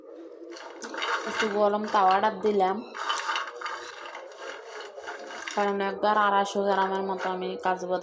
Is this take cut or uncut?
cut